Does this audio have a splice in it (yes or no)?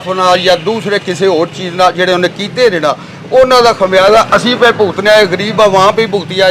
no